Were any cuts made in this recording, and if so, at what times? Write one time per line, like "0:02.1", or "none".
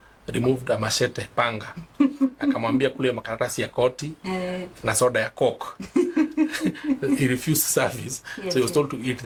none